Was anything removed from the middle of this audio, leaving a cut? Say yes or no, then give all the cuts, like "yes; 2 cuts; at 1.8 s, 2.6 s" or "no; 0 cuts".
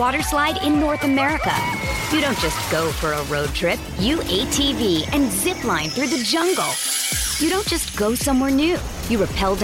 no; 0 cuts